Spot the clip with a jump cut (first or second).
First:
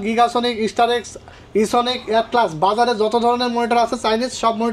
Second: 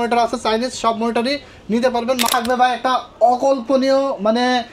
second